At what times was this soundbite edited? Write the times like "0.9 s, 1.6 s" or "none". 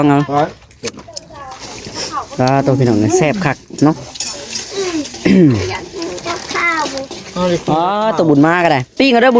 none